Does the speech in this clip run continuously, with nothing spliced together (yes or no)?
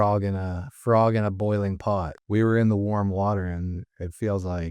no